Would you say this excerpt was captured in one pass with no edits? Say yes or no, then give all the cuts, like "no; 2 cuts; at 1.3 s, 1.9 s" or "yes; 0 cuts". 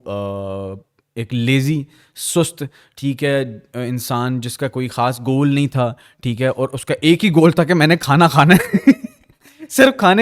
yes; 0 cuts